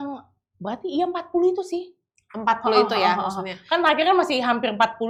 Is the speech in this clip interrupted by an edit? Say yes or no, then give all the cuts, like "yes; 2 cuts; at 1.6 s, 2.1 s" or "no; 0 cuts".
no; 0 cuts